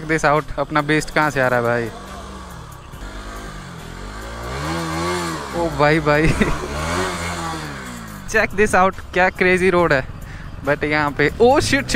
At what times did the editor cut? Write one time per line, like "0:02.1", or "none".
0:03.0
0:08.2